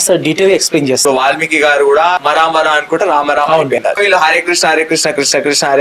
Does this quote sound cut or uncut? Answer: cut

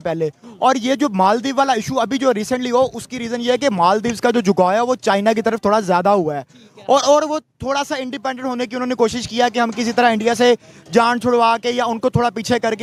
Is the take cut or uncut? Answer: uncut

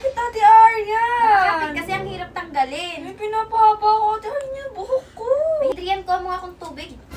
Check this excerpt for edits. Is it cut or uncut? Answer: cut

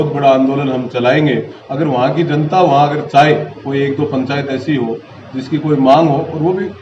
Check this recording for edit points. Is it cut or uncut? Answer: cut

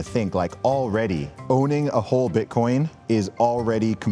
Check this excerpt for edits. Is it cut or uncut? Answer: cut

